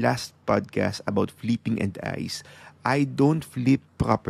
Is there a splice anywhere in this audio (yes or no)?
no